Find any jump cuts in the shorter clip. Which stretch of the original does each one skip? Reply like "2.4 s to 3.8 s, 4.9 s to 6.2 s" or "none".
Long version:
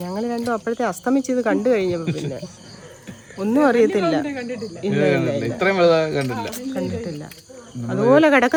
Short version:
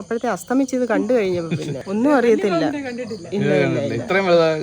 2.3 s to 3.3 s